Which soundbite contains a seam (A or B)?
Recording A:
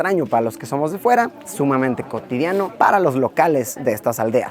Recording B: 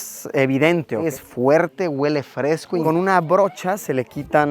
B